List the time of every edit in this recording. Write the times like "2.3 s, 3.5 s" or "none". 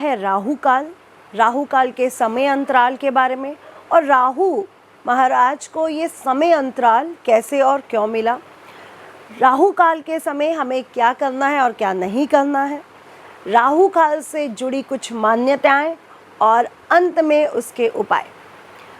none